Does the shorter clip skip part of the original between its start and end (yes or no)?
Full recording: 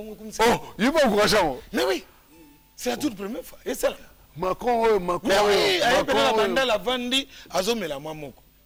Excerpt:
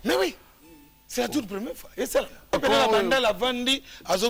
yes